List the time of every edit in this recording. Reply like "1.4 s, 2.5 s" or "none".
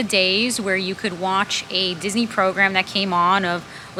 none